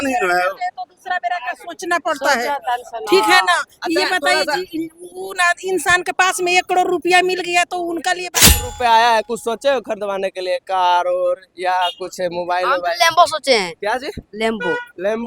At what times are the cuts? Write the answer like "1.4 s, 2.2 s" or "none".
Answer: 8.7 s